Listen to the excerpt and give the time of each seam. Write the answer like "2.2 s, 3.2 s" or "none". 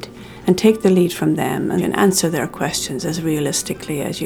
1.9 s